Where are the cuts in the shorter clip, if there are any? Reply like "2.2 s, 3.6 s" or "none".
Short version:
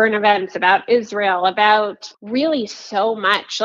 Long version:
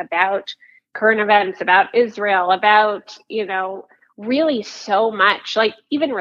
2.1 s